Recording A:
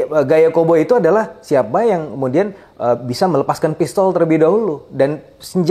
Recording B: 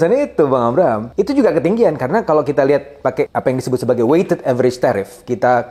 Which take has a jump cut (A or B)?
B